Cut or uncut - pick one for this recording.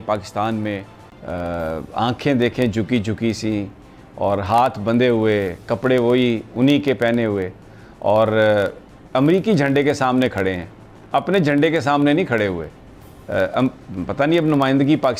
uncut